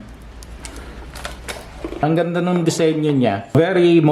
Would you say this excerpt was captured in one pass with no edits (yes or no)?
no